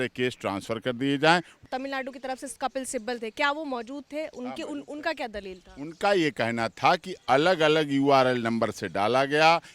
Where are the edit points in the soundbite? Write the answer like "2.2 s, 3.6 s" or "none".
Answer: 1.6 s